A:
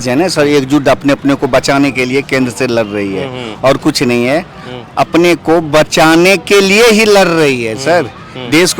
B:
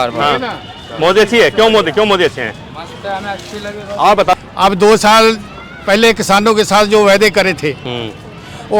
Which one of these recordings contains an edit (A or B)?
B